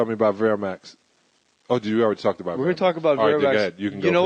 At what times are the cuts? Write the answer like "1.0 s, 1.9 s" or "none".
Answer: 3.0 s